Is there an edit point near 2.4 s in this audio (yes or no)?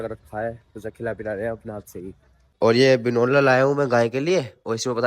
yes